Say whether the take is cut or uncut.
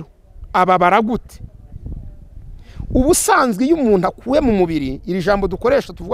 uncut